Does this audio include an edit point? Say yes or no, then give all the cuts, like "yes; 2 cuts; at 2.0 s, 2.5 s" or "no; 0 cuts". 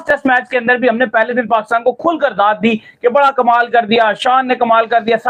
no; 0 cuts